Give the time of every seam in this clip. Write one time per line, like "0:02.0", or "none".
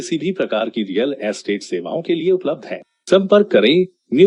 none